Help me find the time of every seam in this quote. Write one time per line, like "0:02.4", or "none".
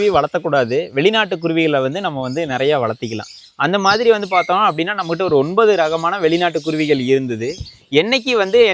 none